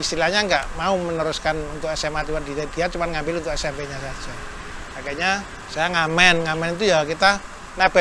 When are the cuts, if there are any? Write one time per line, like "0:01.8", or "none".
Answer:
none